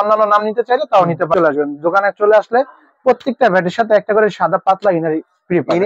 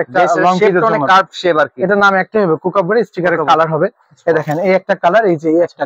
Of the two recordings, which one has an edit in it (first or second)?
first